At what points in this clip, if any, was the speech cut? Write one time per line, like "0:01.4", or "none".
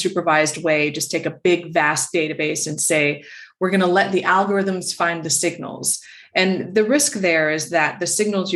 none